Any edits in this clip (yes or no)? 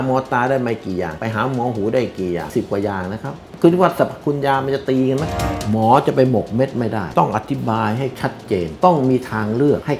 yes